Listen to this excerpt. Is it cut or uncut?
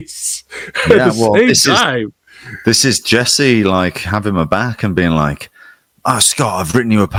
uncut